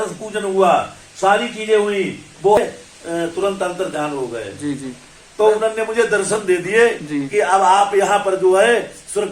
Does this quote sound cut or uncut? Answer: cut